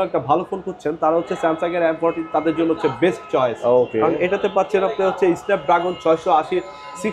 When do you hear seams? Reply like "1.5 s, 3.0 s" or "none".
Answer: none